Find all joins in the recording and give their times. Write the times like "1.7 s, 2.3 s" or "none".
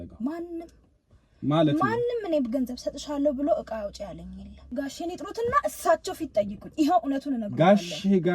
4.6 s

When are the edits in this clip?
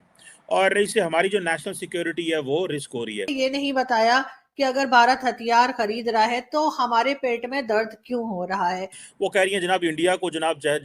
3.3 s, 9.0 s

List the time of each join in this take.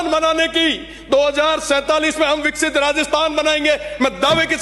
none

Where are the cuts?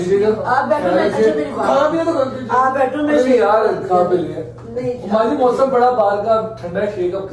none

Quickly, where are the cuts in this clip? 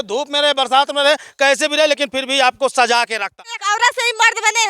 3.4 s

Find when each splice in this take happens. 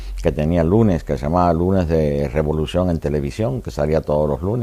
2.2 s

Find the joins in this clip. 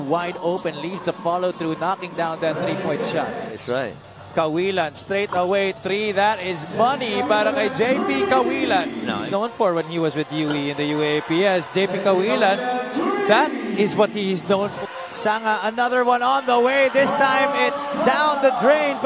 3.5 s, 9.3 s, 14.7 s

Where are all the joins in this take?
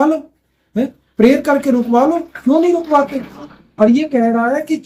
none

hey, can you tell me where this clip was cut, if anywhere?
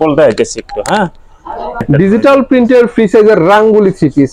1.8 s

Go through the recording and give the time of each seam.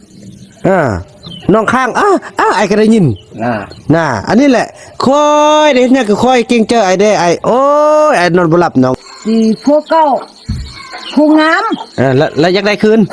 8.9 s

